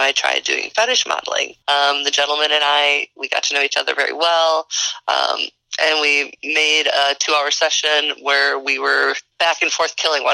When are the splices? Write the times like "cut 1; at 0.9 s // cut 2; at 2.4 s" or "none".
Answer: cut 1; at 1.5 s // cut 2; at 9.3 s